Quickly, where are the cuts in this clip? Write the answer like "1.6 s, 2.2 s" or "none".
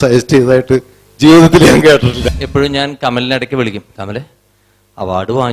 2.2 s